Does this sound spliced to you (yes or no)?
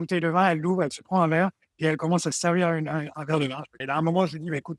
yes